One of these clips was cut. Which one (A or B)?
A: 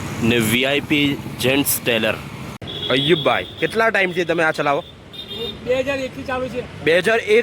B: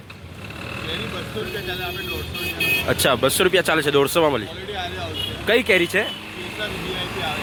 A